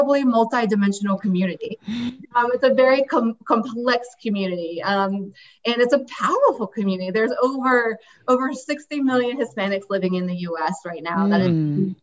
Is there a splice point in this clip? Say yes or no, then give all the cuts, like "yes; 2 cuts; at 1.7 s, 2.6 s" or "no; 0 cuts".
yes; 1 cut; at 2.2 s